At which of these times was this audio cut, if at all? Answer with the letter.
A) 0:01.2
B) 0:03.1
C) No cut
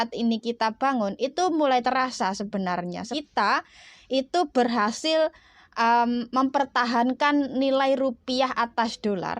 B